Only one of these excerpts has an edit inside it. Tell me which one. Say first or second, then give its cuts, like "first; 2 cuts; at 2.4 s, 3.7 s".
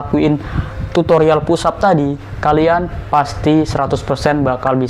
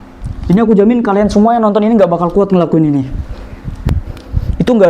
second; 1 cut; at 3.9 s